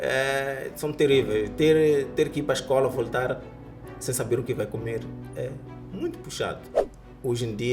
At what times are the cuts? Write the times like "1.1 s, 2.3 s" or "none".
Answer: 6.7 s